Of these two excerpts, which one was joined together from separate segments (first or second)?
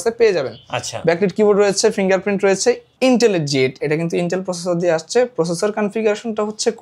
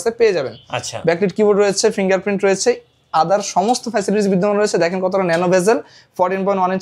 first